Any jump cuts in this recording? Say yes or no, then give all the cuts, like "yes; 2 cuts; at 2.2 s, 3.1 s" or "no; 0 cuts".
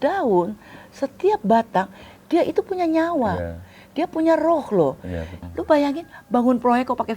yes; 1 cut; at 5.4 s